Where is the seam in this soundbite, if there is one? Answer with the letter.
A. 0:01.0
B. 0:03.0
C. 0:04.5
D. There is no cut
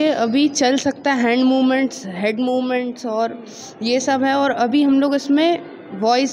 D